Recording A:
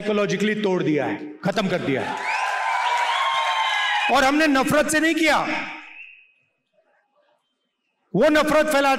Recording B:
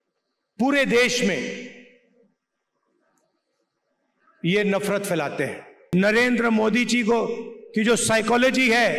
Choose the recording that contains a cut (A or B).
B